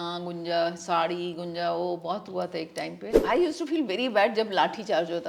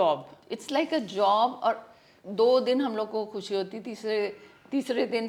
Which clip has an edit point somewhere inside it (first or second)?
first